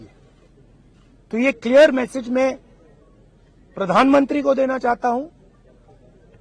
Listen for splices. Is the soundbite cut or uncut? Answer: uncut